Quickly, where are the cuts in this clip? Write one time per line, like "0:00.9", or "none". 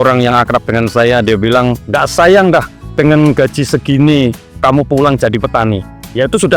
0:01.8